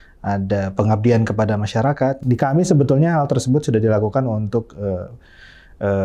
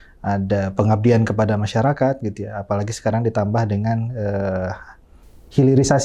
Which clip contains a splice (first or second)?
first